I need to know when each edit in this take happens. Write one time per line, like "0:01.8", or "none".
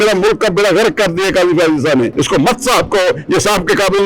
0:02.1